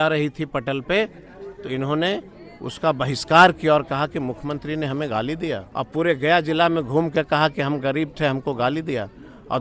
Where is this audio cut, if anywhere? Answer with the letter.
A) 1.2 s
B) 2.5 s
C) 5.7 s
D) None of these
C